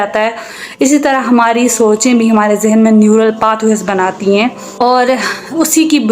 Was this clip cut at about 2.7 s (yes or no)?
no